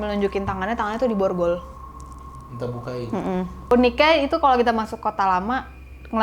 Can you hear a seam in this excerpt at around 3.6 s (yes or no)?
yes